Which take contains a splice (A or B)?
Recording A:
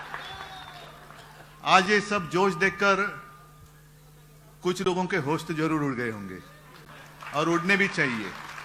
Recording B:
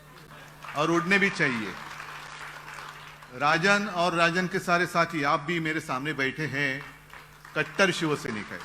B